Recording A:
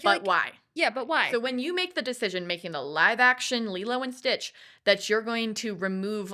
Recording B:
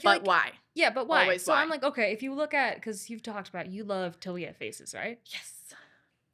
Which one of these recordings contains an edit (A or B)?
A